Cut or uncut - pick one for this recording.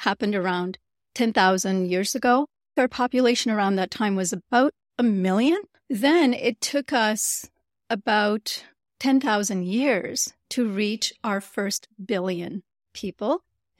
cut